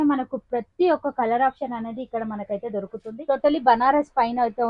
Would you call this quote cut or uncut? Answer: cut